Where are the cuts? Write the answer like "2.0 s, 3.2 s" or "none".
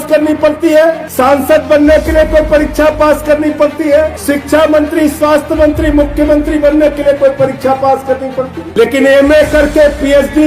1.1 s, 4.2 s, 8.6 s